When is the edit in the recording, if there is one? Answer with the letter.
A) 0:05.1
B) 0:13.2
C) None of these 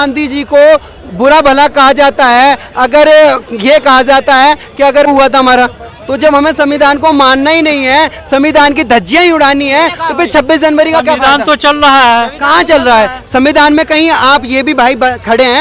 A